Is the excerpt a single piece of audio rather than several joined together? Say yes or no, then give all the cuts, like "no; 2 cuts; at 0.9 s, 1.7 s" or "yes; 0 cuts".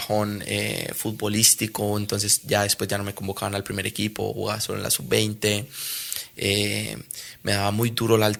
yes; 0 cuts